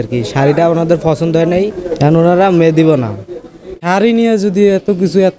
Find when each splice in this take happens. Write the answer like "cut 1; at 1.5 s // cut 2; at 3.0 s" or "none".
cut 1; at 3.8 s